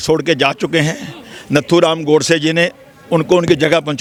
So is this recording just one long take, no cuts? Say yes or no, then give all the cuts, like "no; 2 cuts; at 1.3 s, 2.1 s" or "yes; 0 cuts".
yes; 0 cuts